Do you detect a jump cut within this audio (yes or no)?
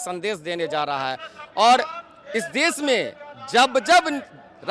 no